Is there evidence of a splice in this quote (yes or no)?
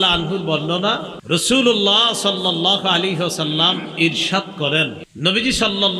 yes